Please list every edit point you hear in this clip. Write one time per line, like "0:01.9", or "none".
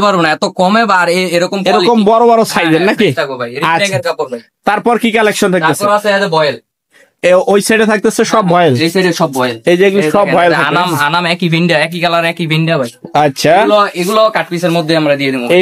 none